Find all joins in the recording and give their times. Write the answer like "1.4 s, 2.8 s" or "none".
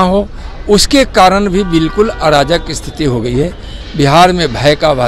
none